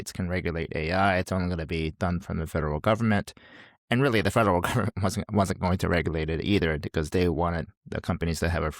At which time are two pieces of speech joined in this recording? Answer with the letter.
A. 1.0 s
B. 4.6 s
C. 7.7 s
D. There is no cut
C